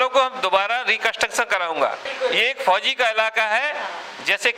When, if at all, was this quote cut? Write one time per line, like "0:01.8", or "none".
0:02.1